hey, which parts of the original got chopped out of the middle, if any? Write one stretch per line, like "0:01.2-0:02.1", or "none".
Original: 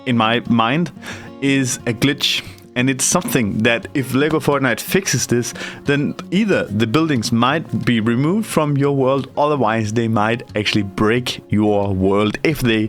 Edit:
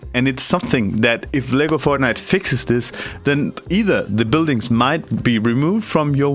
none